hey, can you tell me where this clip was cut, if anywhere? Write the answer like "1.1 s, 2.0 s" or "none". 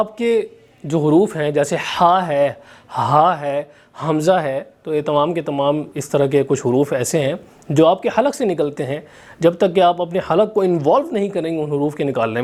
none